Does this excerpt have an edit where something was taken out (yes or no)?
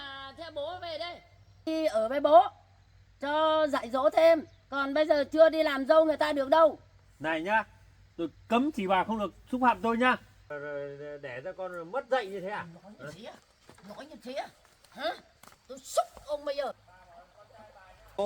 yes